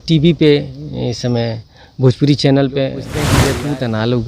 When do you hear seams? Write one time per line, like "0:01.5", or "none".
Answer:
0:03.2